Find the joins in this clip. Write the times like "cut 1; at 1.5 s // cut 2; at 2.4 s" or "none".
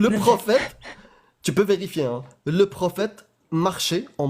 none

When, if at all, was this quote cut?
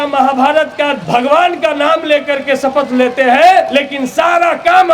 cut 1; at 1.0 s // cut 2; at 3.7 s

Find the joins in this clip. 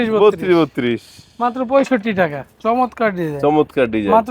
cut 1; at 2.5 s

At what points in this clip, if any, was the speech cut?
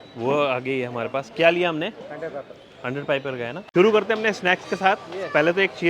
cut 1; at 3.6 s

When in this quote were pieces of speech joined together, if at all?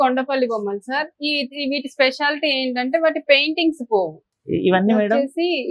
cut 1; at 4.3 s

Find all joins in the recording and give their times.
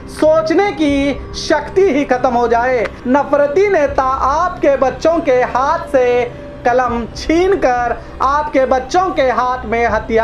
cut 1; at 2.9 s

